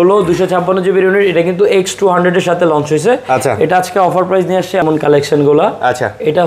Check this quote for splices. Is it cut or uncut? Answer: cut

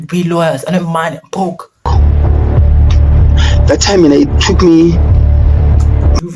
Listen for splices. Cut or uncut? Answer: cut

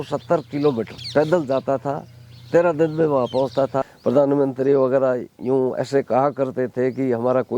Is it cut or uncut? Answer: cut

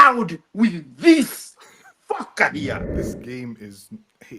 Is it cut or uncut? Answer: cut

